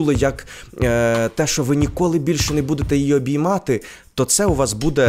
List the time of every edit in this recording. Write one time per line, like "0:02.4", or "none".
none